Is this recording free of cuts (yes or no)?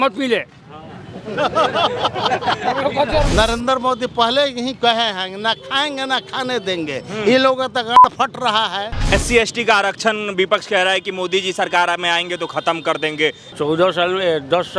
no